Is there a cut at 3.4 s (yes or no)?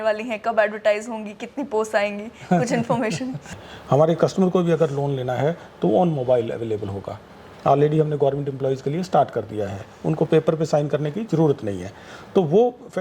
yes